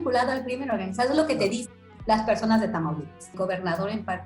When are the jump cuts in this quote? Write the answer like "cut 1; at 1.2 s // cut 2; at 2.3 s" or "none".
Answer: cut 1; at 3.3 s